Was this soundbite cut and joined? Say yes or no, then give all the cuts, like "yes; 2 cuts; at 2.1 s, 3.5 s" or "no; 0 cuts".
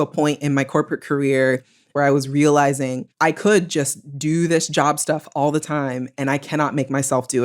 yes; 2 cuts; at 1.9 s, 3.1 s